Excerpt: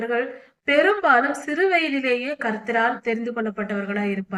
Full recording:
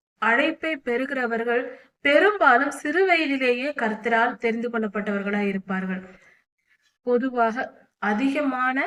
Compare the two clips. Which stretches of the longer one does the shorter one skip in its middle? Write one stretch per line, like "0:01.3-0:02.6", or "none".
none